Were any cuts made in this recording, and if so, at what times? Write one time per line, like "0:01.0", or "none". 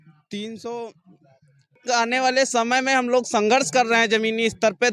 0:01.8